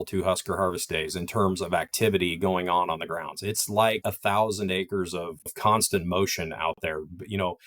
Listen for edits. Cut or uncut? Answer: cut